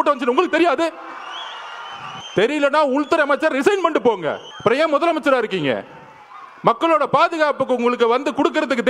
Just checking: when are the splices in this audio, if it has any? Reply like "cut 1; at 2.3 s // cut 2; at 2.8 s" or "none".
cut 1; at 2.1 s // cut 2; at 4.5 s